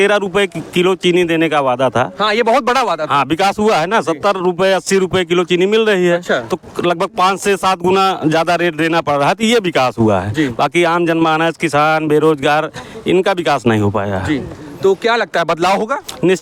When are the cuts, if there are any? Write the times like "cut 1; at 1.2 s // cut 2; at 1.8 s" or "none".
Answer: none